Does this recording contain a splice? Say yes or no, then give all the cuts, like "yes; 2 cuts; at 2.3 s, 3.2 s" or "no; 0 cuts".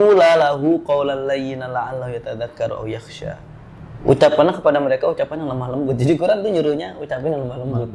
no; 0 cuts